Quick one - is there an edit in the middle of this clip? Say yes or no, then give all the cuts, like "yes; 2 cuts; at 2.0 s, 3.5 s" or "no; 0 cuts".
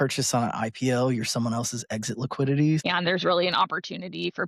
yes; 1 cut; at 2.8 s